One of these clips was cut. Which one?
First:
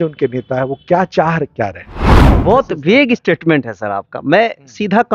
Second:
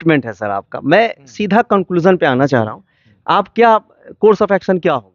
first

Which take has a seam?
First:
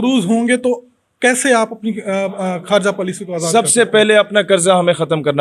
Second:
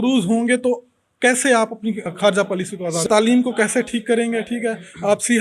second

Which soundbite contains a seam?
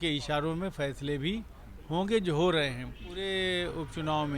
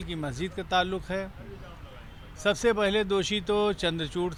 first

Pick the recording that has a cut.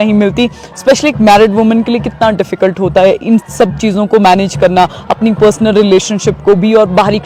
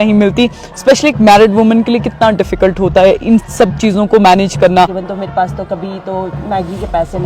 second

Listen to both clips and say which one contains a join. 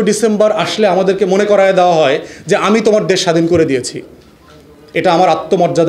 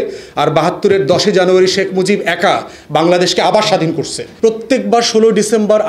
second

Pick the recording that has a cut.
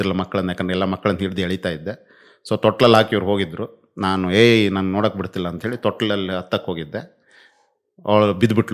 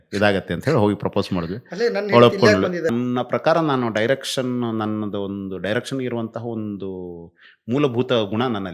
second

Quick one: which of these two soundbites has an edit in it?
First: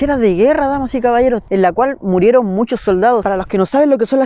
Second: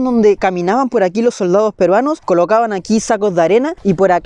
first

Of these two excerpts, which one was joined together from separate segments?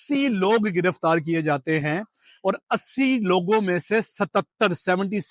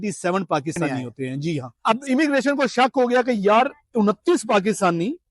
second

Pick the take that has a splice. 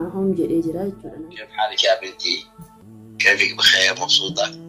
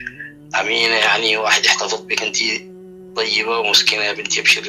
first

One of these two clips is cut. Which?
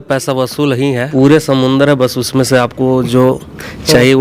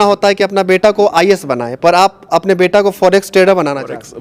first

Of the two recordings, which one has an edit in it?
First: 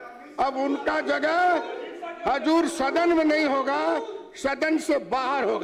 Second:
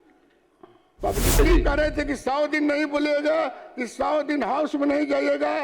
second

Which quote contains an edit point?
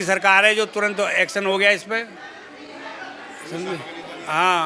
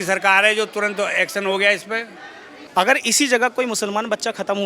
second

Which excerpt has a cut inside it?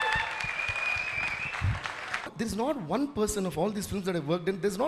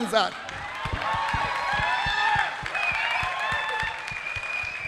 first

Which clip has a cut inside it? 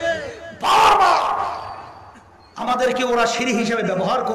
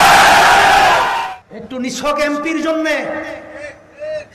second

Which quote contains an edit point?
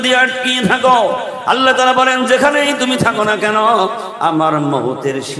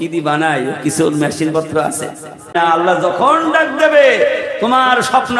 second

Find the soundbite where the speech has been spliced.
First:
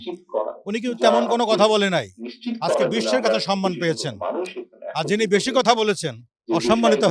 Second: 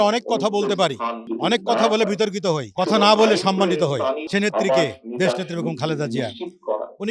second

